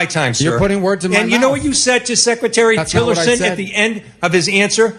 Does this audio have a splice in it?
no; 0 cuts

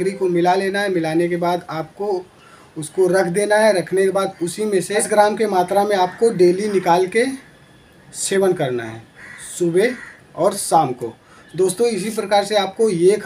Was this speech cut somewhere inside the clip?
yes; 1 cut; at 5.1 s

